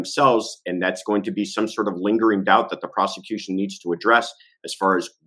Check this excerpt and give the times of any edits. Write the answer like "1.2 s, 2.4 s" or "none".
none